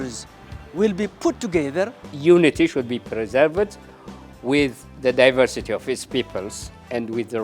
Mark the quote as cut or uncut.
cut